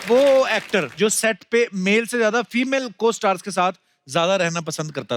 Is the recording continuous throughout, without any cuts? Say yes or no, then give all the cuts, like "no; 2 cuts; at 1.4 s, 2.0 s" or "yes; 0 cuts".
no; 1 cut; at 0.9 s